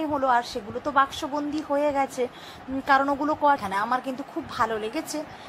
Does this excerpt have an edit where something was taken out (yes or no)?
yes